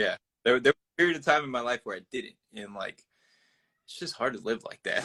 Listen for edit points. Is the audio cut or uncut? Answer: uncut